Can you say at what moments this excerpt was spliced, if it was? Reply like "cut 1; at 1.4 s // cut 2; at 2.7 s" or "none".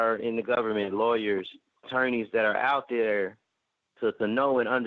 cut 1; at 1.9 s